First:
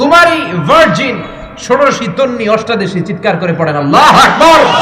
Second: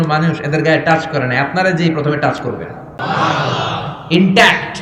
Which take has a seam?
second; 1 cut; at 3.0 s

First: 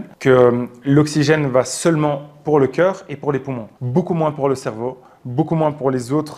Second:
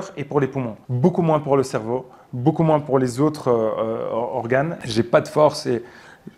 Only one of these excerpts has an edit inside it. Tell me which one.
second; 1 cut; at 4.8 s

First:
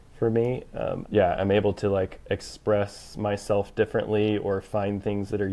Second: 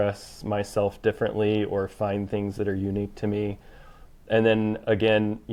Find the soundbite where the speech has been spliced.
first; 1 cut; at 1.0 s

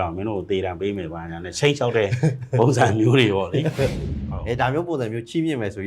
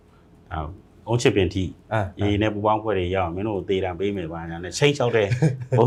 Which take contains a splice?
first; 1 cut; at 4.1 s

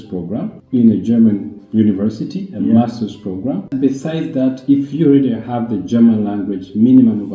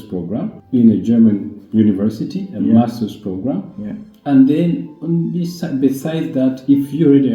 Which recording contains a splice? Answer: first; 1 cut; at 3.7 s

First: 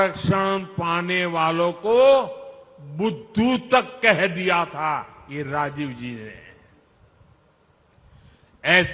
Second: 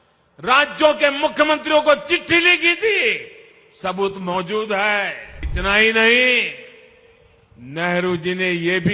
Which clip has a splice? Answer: second; 1 cut; at 5.5 s

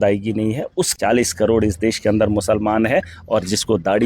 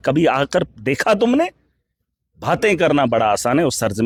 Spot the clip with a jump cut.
first; 1 cut; at 0.9 s

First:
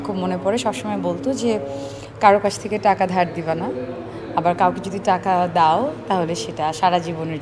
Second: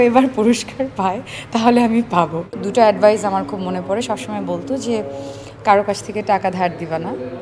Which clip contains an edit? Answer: second; 1 cut; at 2.5 s

